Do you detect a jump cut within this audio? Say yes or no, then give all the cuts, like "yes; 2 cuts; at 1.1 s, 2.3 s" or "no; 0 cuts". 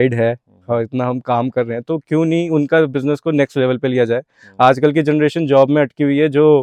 no; 0 cuts